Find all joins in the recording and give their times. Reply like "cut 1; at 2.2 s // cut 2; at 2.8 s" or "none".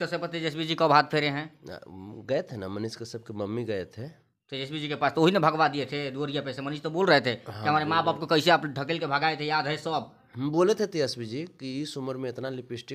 none